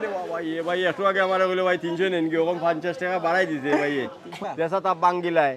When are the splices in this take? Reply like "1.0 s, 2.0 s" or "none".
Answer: 4.3 s